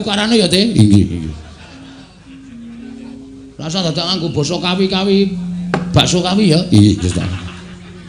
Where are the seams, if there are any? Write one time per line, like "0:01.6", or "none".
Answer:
none